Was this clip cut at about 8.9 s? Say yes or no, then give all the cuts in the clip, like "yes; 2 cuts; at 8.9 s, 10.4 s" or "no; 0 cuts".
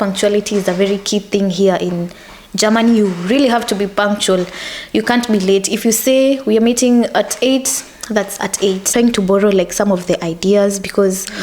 yes; 1 cut; at 8.9 s